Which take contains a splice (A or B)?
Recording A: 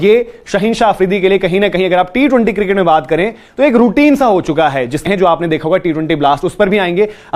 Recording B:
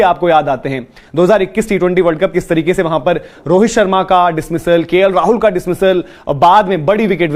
A